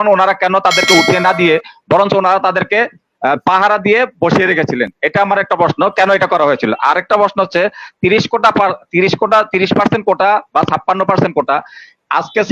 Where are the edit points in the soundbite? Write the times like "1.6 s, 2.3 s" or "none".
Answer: none